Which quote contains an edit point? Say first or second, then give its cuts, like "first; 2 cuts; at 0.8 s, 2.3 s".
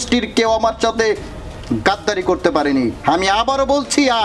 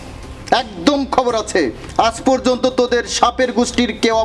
first; 1 cut; at 3.0 s